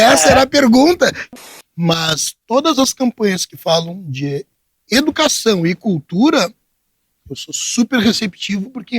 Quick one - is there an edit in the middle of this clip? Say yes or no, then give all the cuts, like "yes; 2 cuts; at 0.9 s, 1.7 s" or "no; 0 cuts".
yes; 1 cut; at 1.2 s